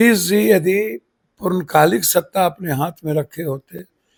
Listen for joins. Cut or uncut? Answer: uncut